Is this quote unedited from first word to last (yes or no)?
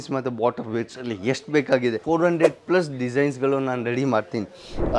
no